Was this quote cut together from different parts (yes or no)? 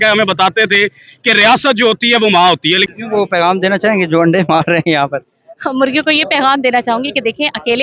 yes